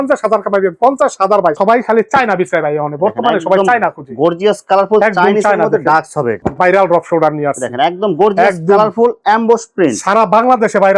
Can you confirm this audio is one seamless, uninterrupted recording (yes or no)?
no